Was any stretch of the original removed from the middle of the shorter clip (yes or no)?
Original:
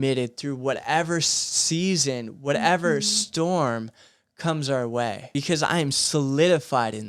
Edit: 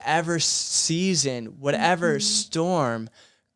no